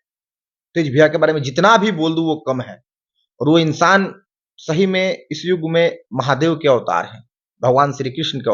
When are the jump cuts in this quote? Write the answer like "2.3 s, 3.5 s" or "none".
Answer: none